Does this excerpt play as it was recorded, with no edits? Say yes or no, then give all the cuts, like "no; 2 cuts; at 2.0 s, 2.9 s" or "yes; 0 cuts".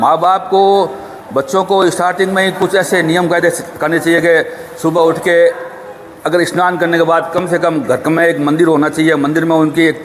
yes; 0 cuts